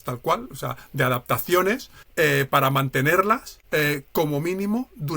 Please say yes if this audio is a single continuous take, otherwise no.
no